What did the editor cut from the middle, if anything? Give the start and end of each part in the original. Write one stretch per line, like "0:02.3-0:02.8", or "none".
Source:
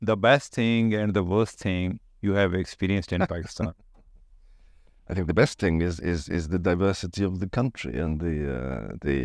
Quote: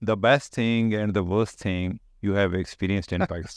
none